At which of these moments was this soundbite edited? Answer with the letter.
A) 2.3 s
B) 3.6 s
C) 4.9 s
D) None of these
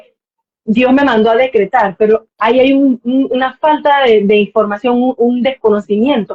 D